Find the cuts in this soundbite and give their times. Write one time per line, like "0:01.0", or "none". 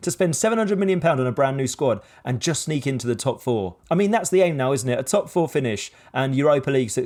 none